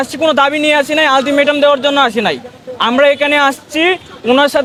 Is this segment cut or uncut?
uncut